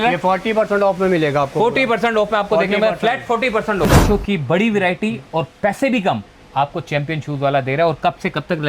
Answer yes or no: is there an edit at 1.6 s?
no